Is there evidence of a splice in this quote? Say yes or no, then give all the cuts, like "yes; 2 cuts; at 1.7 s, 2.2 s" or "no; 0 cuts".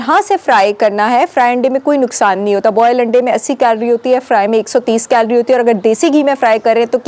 no; 0 cuts